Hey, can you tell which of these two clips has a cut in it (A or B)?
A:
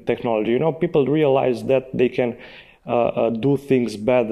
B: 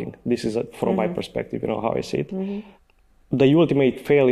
B